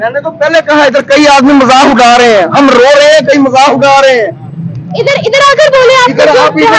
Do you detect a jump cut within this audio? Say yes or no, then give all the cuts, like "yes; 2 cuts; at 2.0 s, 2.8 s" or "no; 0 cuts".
no; 0 cuts